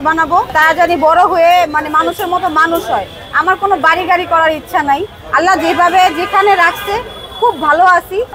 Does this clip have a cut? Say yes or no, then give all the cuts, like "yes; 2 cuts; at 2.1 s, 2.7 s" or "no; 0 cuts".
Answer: no; 0 cuts